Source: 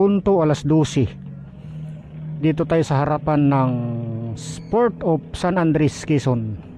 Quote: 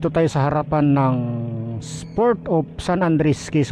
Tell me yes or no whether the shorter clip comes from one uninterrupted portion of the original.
yes